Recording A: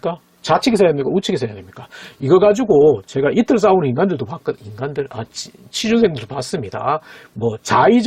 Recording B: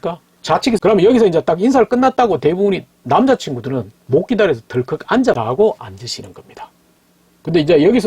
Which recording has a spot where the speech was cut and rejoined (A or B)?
B